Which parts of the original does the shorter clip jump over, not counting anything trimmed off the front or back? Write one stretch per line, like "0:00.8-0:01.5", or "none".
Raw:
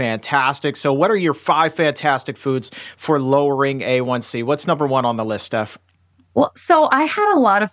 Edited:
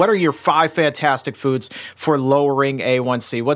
none